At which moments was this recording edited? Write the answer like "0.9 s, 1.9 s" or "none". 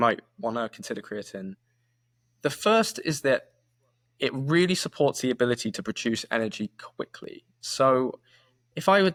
none